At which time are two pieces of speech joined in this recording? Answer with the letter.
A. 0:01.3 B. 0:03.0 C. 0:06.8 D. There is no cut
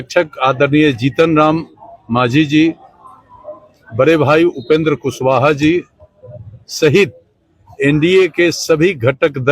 D